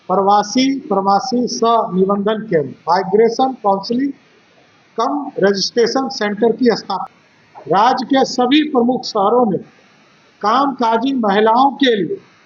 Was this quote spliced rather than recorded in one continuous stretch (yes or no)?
yes